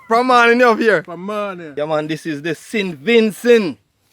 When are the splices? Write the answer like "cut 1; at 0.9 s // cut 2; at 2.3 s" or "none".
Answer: cut 1; at 1.6 s